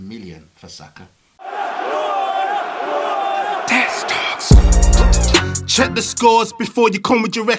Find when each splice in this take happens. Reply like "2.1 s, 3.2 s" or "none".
1.3 s